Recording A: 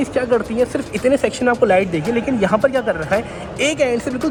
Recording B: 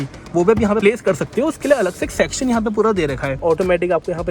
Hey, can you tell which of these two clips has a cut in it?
B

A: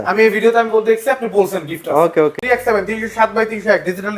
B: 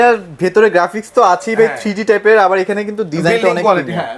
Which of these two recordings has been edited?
A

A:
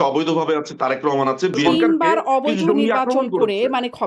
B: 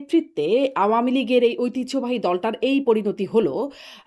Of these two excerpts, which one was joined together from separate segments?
A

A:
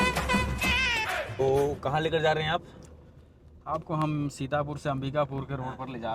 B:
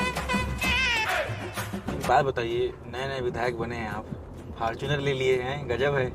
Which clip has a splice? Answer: B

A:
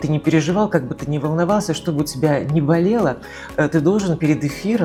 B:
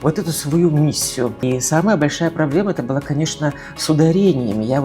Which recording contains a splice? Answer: B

